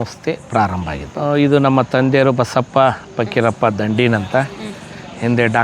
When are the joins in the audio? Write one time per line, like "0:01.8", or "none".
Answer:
0:01.1